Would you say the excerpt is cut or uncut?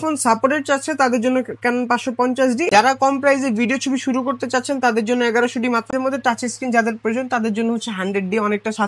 cut